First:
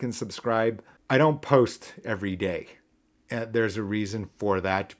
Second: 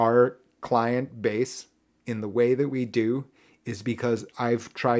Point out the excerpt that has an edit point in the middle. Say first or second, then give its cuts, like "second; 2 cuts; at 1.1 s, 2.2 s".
first; 1 cut; at 0.9 s